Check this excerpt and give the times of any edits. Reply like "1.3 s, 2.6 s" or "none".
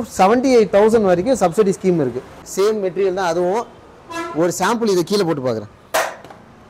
2.4 s